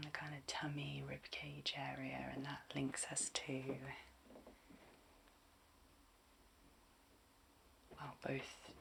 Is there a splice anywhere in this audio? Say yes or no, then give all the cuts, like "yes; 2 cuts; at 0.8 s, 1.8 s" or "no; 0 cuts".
no; 0 cuts